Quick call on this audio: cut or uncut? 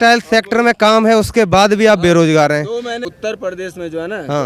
cut